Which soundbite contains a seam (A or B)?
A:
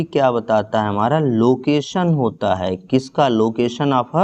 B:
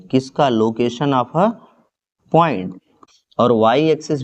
B